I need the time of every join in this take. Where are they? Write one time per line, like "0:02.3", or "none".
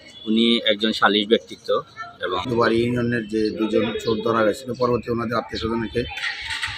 0:02.5